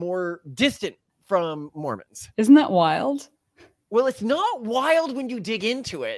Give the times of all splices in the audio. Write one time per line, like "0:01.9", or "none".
none

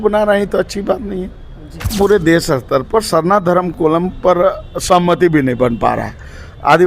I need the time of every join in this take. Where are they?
0:01.9

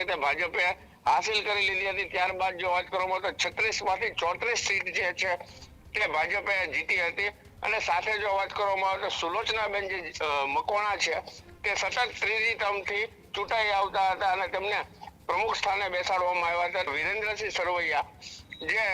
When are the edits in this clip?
0:16.9

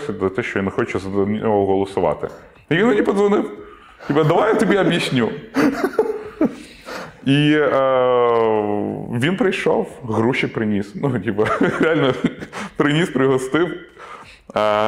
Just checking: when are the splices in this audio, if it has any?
none

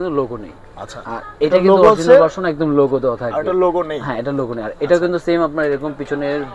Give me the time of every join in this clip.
none

